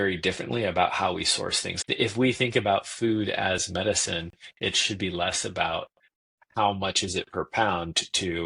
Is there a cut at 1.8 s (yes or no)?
yes